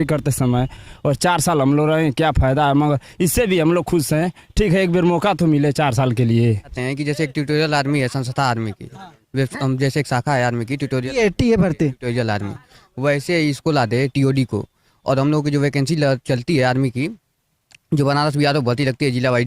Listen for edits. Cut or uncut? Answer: cut